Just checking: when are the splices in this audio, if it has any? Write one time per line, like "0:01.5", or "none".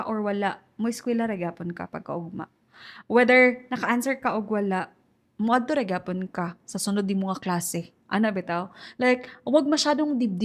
none